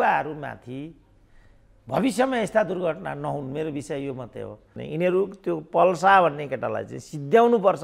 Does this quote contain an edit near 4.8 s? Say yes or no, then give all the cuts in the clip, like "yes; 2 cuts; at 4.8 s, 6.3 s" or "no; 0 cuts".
yes; 1 cut; at 4.8 s